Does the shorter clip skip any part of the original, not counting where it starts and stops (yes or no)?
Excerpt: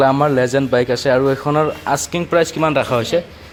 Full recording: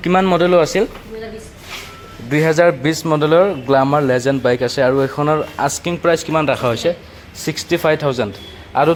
no